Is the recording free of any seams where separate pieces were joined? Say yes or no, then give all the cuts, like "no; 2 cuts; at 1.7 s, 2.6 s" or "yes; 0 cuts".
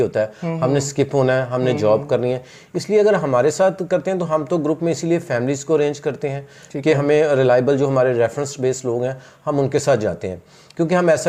yes; 0 cuts